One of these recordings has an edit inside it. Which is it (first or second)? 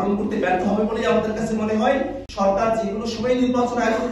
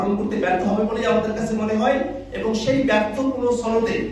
first